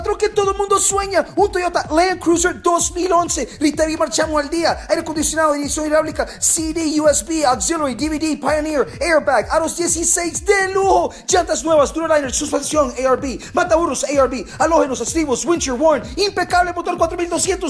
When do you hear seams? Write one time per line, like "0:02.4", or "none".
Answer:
none